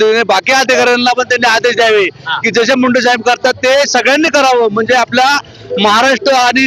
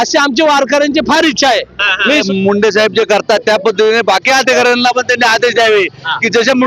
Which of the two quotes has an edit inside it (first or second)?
second